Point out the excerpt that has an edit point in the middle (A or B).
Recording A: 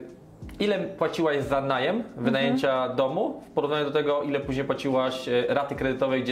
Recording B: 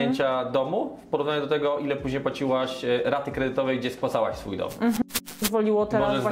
B